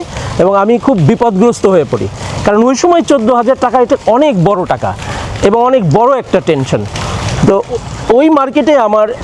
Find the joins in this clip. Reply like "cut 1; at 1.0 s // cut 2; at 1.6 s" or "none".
none